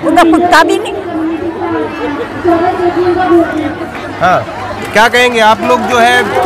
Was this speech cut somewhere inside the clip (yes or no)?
no